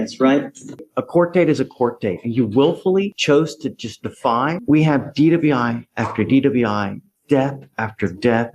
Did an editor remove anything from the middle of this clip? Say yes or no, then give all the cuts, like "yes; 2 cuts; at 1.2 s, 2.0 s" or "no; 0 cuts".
yes; 2 cuts; at 0.8 s, 4.6 s